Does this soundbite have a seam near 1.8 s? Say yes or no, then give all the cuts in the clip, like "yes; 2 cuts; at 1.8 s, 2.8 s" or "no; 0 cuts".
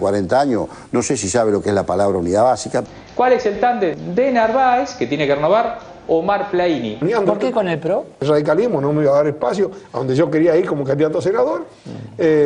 no; 2 cuts; at 6.9 s, 8.2 s